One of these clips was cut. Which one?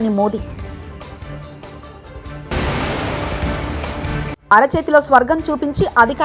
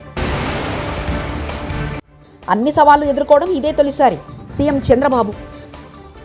first; 2 cuts; at 2.5 s, 4.4 s

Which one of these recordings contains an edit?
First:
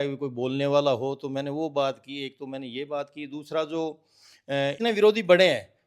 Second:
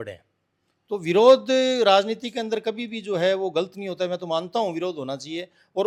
first; 1 cut; at 4.8 s

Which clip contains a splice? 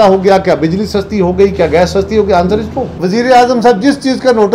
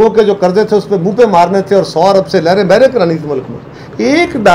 first; 1 cut; at 2.8 s

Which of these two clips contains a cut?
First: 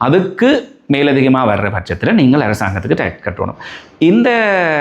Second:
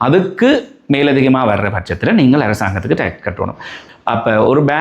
second; 1 cut; at 3.8 s

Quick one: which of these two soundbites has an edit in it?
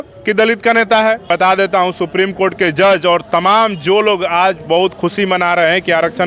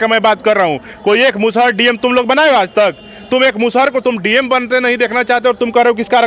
first; 1 cut; at 1.3 s

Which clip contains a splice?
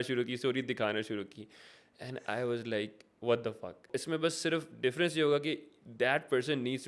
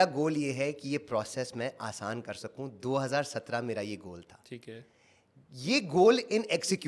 first; 1 cut; at 3.9 s

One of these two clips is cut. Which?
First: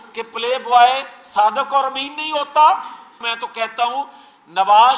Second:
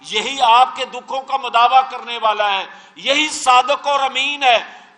first; 1 cut; at 3.3 s

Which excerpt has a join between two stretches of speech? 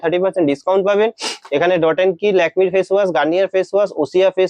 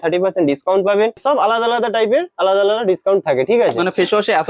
second; 1 cut; at 1.2 s

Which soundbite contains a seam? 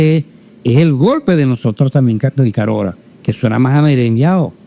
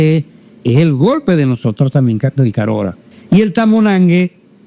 second; 1 cut; at 3.1 s

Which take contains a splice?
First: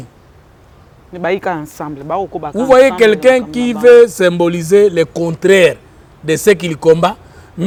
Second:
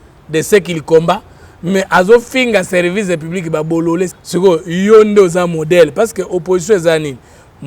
second; 1 cut; at 4.2 s

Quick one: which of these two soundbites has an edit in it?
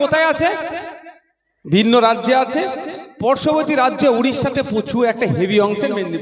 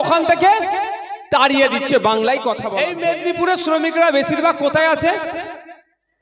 second; 1 cut; at 2.7 s

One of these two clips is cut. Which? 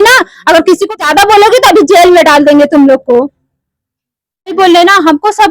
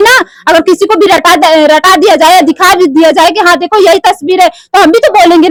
first; 2 cuts; at 1.0 s, 4.5 s

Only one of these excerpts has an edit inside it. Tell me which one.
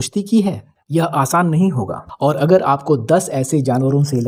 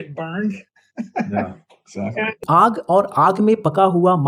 second; 1 cut; at 2.4 s

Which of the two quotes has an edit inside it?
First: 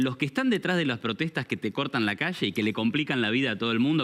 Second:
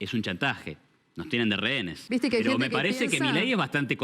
second; 1 cut; at 1.9 s

